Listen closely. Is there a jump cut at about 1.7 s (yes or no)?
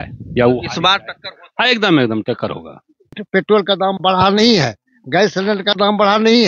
no